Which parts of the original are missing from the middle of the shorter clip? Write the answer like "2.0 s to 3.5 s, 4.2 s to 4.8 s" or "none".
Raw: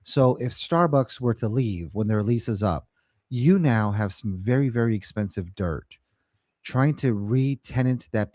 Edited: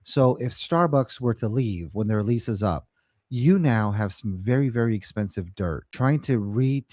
5.9 s to 6.6 s

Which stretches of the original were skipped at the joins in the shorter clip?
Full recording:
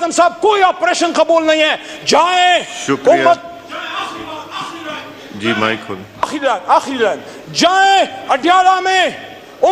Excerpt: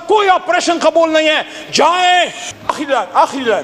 2.7 s to 5.9 s

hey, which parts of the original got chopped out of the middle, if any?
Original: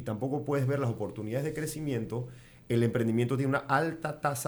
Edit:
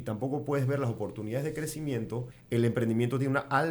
2.3 s to 2.5 s

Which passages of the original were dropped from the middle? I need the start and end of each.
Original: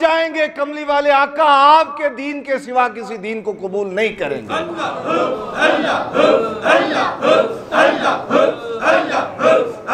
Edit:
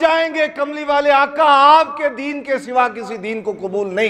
none

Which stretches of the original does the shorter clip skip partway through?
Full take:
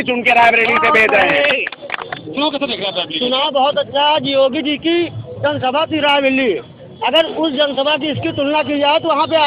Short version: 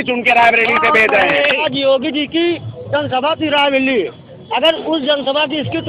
1.6 s to 4.1 s

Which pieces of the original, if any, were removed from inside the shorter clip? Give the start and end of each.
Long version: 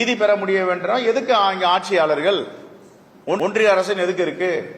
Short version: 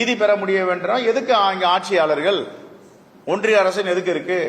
3.3 s to 3.4 s

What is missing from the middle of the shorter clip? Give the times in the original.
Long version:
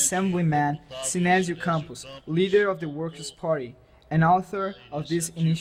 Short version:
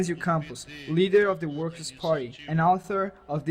3.8 s to 4.0 s

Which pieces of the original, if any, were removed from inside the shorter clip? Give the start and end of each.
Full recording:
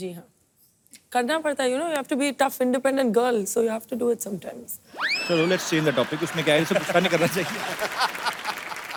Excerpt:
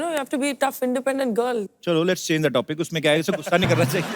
3.5 s to 5.1 s

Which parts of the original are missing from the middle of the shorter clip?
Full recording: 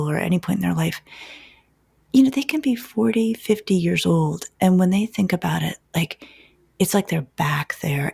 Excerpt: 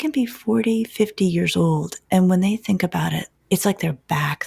5.8 s to 6.6 s

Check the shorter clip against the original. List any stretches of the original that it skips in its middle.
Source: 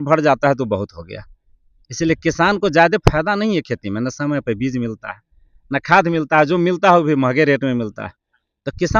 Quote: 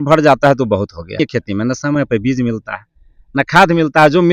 1.2 s to 3.6 s

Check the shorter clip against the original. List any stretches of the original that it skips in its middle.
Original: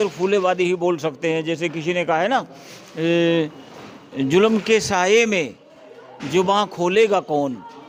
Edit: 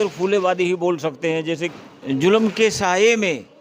1.7 s to 3.8 s

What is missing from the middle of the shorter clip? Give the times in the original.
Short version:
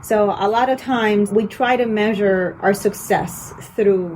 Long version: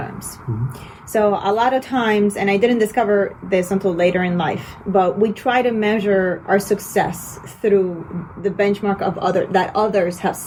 2.3 s to 5.2 s

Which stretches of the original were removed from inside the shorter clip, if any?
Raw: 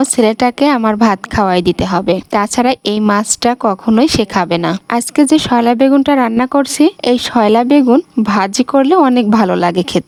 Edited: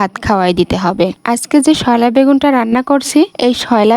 2.2 s to 4.8 s

